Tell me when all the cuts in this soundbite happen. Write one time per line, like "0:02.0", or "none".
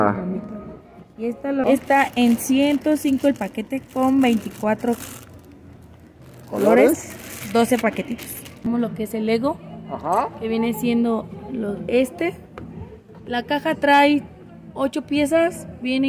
0:01.6
0:08.6

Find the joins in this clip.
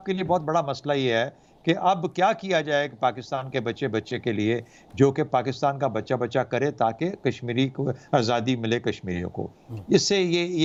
none

